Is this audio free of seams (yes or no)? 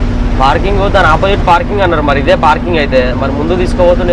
yes